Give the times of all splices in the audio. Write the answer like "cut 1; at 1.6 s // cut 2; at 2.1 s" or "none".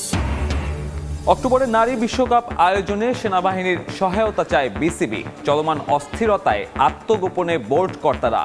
cut 1; at 1.1 s